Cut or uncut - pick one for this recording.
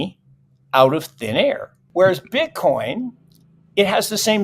cut